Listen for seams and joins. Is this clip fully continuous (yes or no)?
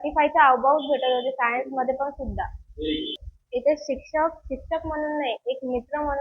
no